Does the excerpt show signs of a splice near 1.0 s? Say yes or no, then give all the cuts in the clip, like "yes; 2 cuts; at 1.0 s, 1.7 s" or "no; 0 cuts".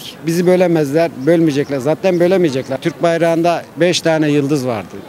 no; 1 cut; at 2.8 s